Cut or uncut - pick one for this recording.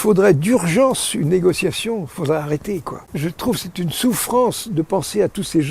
cut